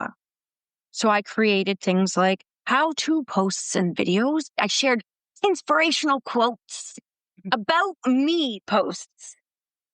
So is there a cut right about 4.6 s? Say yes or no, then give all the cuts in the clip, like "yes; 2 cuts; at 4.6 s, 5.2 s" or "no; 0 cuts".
yes; 1 cut; at 4.6 s